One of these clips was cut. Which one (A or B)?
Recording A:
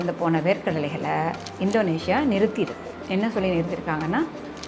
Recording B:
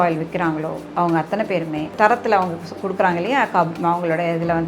B